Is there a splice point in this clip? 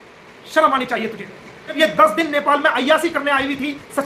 yes; 1 cut; at 1.8 s

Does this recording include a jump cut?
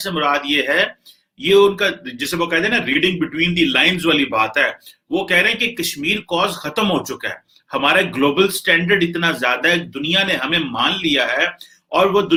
no; 0 cuts

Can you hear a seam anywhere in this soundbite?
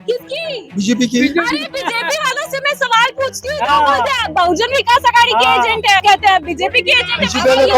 yes; 1 cut; at 6.0 s

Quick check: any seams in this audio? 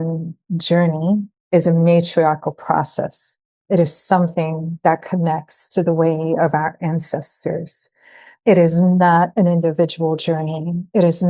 yes; 1 cut; at 1.3 s

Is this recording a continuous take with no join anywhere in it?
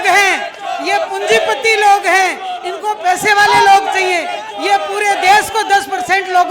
yes; 0 cuts

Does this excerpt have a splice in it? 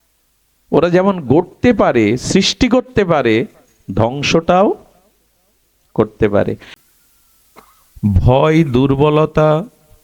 yes; 1 cut; at 6.7 s

